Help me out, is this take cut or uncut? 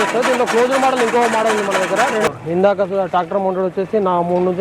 cut